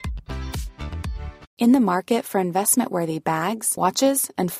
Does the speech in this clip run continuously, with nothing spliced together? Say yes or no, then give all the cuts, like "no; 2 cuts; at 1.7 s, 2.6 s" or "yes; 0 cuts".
no; 1 cut; at 1.4 s